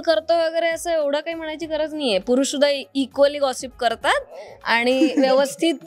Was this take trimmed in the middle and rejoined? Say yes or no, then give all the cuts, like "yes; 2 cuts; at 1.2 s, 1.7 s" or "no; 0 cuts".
no; 0 cuts